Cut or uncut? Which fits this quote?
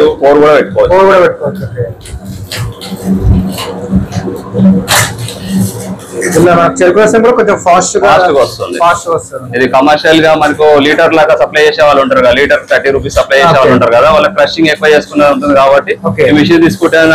uncut